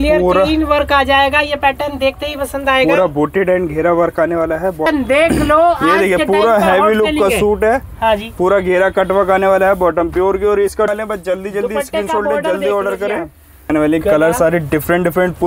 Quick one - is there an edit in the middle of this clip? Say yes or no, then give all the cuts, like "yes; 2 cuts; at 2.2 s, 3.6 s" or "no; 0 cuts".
yes; 3 cuts; at 4.9 s, 10.9 s, 13.7 s